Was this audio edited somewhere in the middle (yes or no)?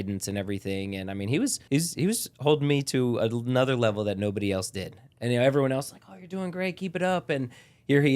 yes